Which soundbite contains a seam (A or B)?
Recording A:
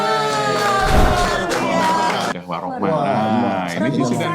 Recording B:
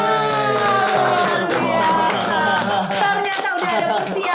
A